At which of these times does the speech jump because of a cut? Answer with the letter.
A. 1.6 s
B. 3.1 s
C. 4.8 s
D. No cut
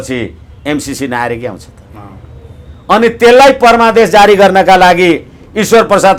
D